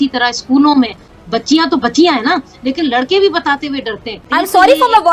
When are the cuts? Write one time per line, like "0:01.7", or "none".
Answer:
0:01.2
0:04.1